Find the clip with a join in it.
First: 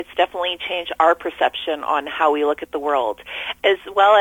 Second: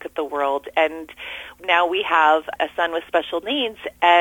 second; 2 cuts; at 1.5 s, 2.5 s

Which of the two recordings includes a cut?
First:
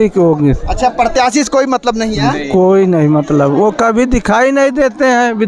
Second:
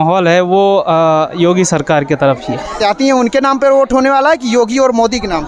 second; 1 cut; at 2.8 s

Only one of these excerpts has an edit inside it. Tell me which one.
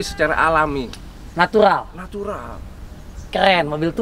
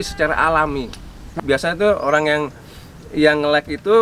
second; 1 cut; at 1.2 s

